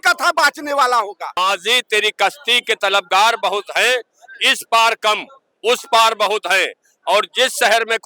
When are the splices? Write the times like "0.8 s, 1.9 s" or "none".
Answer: 1.4 s